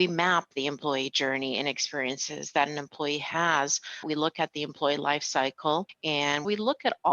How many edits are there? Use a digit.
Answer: 2